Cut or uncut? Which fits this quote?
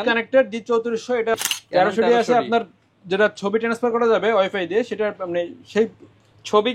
cut